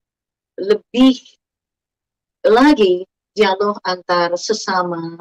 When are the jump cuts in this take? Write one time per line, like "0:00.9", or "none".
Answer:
none